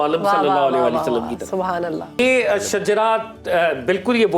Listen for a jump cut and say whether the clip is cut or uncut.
cut